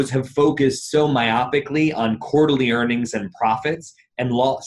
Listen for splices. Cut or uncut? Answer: uncut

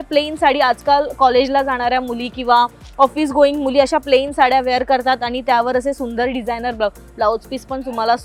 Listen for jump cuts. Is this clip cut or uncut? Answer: uncut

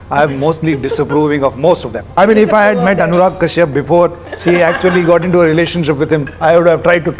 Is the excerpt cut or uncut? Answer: cut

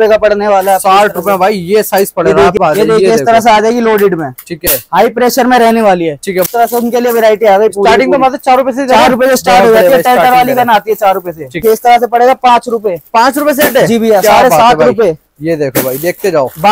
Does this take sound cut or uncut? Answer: cut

